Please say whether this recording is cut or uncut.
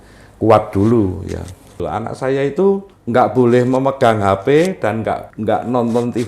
cut